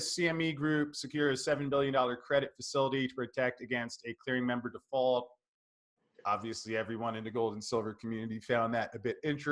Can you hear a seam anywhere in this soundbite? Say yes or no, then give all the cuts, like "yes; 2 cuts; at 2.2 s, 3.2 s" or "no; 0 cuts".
no; 0 cuts